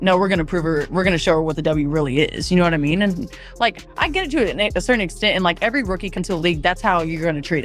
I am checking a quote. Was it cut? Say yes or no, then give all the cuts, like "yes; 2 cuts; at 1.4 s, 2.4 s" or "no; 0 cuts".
yes; 1 cut; at 6.1 s